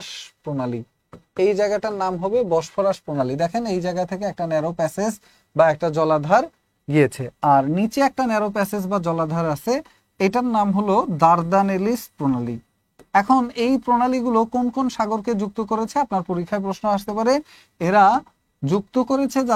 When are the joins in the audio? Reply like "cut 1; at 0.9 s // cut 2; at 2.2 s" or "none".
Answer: none